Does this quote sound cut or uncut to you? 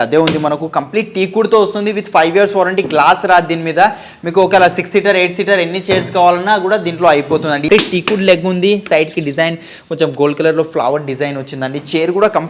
cut